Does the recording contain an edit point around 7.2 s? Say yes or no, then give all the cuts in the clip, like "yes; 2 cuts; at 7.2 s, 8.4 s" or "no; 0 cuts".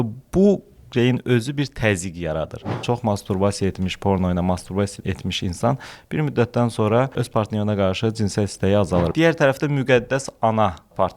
yes; 4 cuts; at 2.8 s, 5.0 s, 7.2 s, 9.1 s